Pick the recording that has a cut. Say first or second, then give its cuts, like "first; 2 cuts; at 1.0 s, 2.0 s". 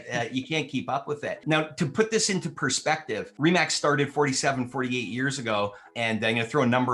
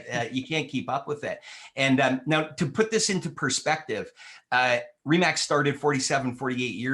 first; 3 cuts; at 1.4 s, 3.3 s, 5.8 s